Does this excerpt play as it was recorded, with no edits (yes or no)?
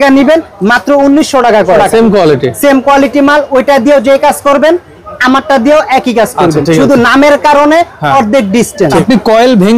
no